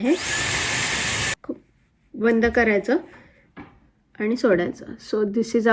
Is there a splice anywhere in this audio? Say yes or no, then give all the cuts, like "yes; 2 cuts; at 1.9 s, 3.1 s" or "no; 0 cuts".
yes; 1 cut; at 1.3 s